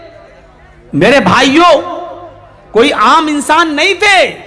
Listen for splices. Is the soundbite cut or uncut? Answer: uncut